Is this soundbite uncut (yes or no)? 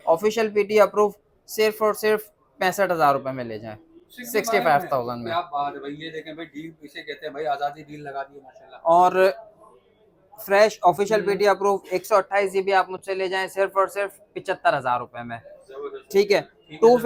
yes